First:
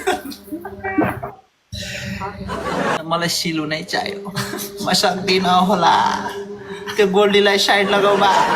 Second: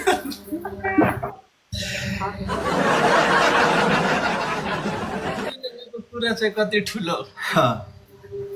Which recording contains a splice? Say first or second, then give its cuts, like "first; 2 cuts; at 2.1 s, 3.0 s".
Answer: first; 1 cut; at 3.0 s